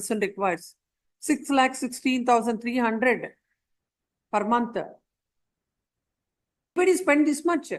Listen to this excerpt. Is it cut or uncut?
cut